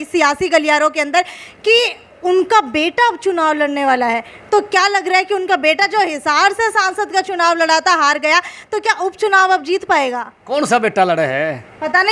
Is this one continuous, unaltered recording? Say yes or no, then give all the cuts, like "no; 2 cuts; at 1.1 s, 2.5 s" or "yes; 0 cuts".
yes; 0 cuts